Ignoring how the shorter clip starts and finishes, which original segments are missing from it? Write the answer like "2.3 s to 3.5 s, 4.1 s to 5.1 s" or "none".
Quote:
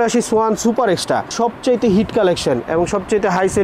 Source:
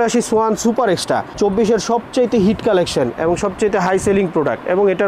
1.3 s to 1.8 s